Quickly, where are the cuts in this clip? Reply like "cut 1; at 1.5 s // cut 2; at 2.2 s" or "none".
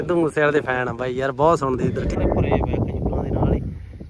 cut 1; at 2.1 s